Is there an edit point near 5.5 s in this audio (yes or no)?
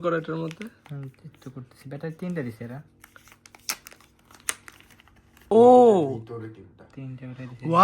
yes